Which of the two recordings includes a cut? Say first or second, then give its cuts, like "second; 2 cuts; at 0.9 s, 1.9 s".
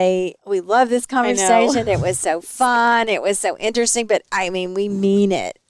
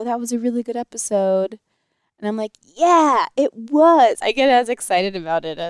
second; 1 cut; at 4.2 s